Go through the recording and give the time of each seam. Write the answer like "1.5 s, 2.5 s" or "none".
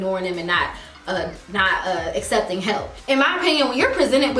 2.9 s